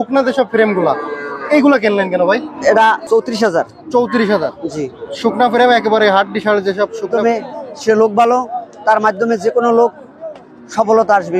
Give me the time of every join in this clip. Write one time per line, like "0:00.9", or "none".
0:02.5
0:07.1